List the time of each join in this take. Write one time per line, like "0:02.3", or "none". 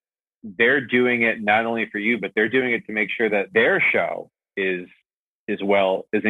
0:03.5